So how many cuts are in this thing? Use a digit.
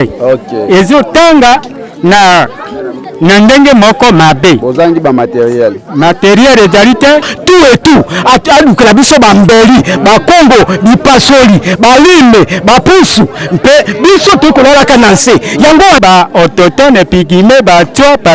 2